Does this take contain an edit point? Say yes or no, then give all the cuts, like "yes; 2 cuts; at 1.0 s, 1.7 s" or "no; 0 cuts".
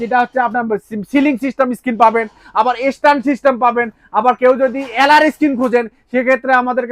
no; 0 cuts